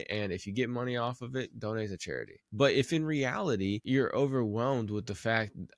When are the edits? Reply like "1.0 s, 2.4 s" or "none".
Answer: 2.4 s, 3.8 s